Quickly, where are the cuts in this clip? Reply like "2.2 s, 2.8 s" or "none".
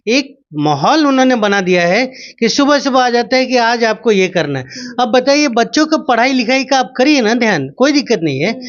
none

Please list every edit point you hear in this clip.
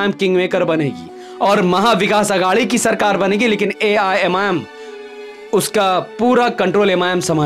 none

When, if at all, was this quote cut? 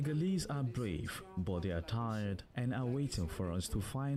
none

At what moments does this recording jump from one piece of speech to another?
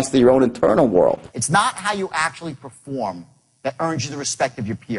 1.3 s

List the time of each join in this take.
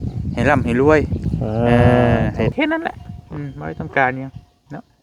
2.5 s

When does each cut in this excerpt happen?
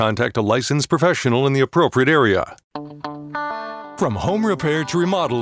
2.6 s

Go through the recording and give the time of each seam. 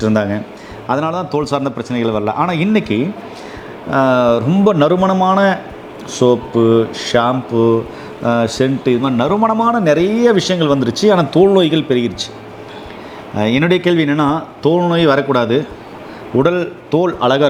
none

